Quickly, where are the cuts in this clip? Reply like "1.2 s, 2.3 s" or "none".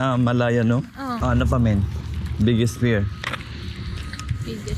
1.2 s